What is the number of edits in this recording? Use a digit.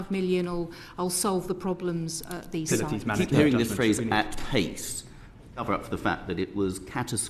1